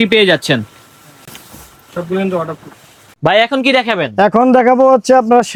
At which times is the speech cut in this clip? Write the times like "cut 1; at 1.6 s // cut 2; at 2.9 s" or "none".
none